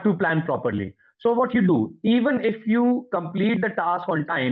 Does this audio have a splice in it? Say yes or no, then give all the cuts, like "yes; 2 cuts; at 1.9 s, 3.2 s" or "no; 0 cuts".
no; 0 cuts